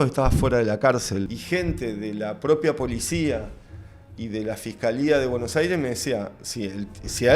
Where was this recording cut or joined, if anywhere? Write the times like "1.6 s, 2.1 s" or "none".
1.3 s